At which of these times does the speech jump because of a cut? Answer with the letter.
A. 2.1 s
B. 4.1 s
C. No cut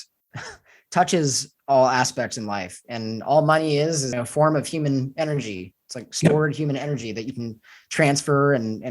B